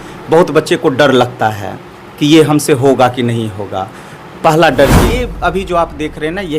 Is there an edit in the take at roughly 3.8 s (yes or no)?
no